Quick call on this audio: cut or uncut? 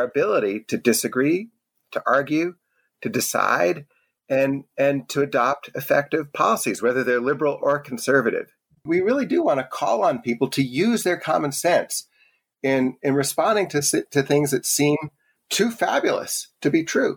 cut